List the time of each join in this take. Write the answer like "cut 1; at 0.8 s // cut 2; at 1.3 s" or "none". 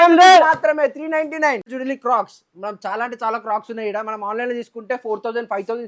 cut 1; at 1.7 s